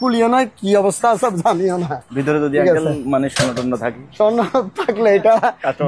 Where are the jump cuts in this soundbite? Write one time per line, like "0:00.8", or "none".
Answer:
none